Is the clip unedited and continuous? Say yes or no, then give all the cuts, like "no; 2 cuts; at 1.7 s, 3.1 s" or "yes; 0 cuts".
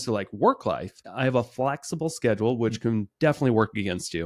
no; 1 cut; at 1.1 s